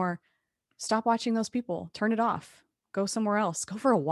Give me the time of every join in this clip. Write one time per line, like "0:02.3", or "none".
none